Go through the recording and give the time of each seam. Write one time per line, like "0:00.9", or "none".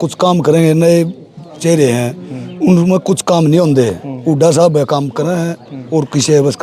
none